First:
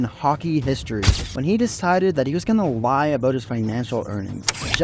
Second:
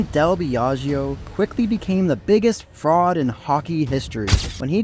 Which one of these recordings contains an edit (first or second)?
second